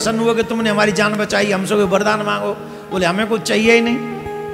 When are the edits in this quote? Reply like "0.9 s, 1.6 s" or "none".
none